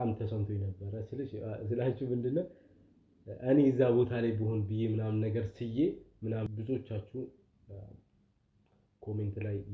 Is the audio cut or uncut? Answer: cut